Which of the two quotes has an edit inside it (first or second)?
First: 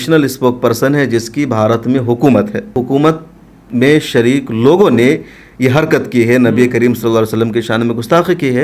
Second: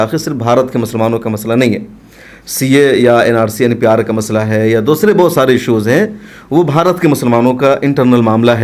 first